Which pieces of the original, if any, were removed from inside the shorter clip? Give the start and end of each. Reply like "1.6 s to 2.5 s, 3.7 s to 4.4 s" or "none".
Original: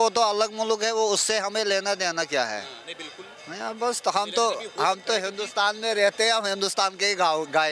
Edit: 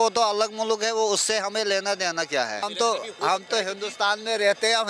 2.6 s to 4.2 s